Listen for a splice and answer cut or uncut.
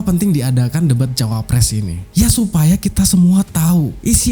uncut